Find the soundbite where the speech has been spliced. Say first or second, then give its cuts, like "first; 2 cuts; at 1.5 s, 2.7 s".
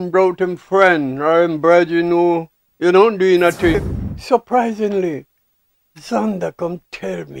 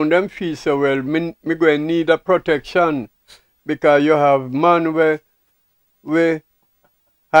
first; 1 cut; at 3.8 s